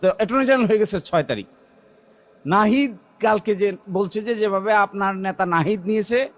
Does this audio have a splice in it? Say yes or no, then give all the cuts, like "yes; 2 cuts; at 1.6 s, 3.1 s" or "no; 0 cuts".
no; 0 cuts